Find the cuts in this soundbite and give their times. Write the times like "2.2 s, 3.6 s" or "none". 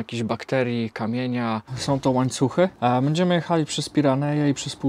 1.7 s, 2.7 s